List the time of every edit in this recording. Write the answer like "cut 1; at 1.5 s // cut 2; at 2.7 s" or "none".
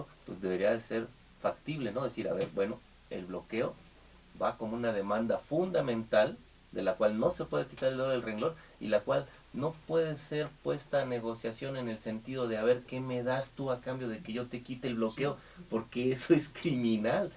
cut 1; at 12.1 s

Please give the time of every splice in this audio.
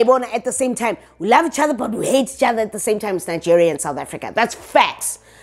none

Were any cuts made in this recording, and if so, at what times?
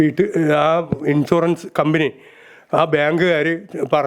none

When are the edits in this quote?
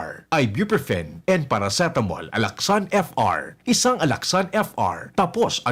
none

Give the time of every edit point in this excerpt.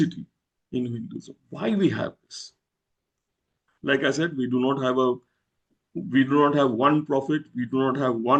none

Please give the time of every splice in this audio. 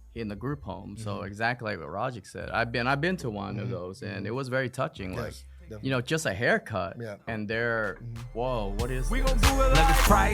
cut 1; at 9.1 s

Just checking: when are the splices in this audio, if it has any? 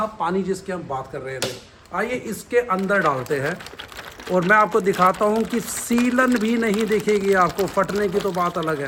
none

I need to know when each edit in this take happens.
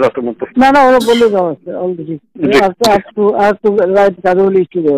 none

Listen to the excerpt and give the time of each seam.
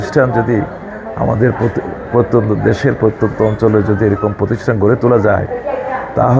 none

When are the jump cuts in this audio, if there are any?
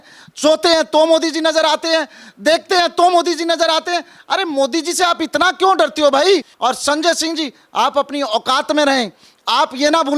cut 1; at 6.5 s

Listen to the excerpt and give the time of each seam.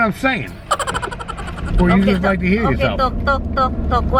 none

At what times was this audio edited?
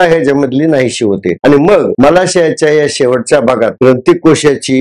none

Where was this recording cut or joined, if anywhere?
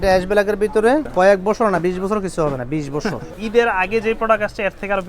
cut 1; at 1.1 s // cut 2; at 3.3 s

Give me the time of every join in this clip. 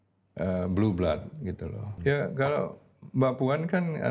cut 1; at 1.9 s

